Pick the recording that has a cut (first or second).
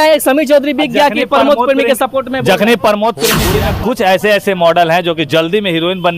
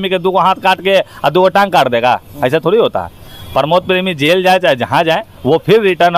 first